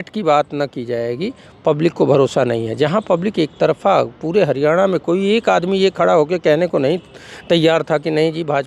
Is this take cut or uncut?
uncut